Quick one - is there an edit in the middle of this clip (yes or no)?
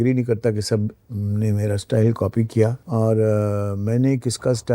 yes